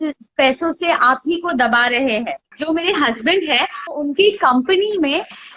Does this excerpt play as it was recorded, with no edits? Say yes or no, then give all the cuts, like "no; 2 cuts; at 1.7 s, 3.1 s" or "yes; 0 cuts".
no; 2 cuts; at 2.5 s, 3.8 s